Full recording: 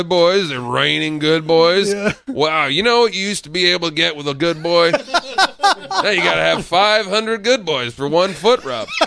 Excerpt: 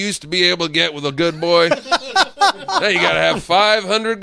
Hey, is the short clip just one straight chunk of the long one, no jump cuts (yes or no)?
yes